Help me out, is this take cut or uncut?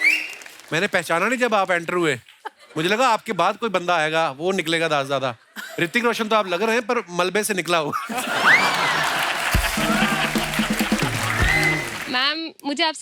cut